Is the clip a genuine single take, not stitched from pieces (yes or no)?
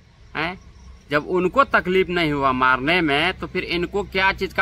yes